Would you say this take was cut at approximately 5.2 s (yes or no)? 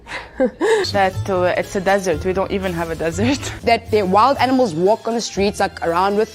no